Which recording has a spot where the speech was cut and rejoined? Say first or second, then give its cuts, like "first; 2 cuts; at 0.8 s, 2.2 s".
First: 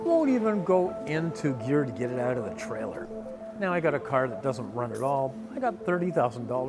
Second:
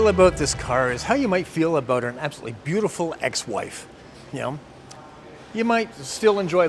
first; 1 cut; at 3.4 s